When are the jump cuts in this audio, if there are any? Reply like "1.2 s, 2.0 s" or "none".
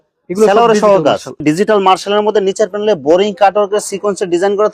1.4 s